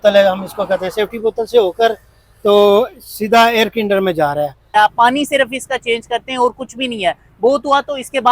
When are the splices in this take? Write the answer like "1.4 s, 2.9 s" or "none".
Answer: 4.7 s